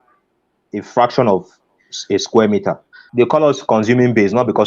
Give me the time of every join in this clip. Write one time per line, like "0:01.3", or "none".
0:03.0

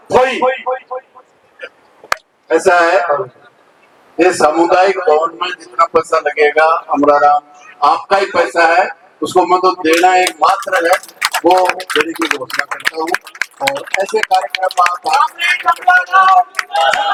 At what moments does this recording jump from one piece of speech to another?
none

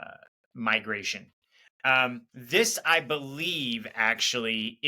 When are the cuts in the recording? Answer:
0:02.3

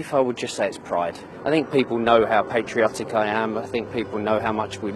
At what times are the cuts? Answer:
0:01.3

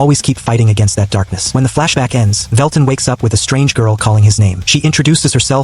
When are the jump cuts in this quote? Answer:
0:01.4
0:02.4
0:04.6

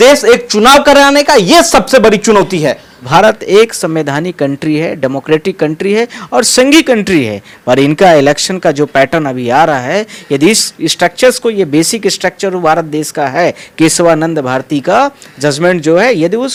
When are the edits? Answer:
none

